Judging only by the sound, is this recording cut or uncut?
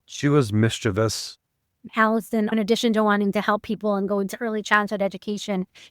cut